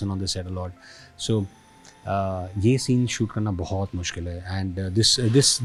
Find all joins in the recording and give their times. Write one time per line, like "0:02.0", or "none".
none